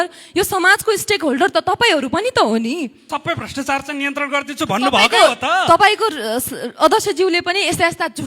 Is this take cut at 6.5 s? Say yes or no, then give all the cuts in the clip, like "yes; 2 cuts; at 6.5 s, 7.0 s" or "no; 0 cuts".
no; 1 cut; at 3.1 s